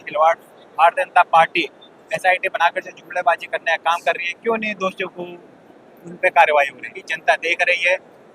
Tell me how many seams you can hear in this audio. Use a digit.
1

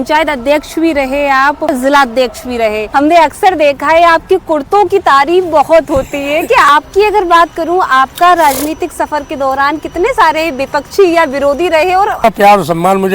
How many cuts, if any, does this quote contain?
4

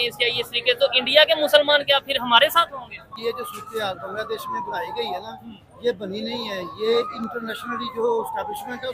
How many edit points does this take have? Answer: 1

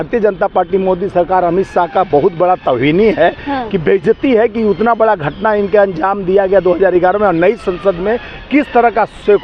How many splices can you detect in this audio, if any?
0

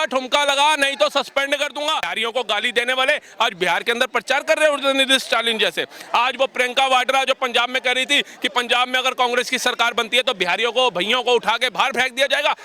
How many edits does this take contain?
1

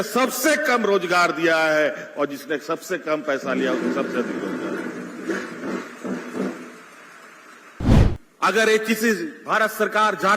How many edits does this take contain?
1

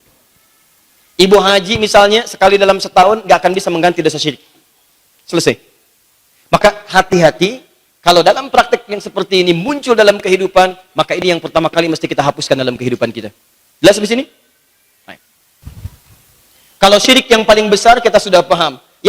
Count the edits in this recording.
1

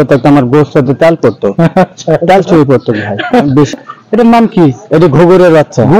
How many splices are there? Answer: 1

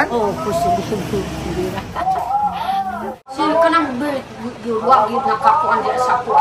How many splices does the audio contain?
1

